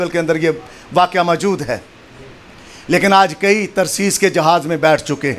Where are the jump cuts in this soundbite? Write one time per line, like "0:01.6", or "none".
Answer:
none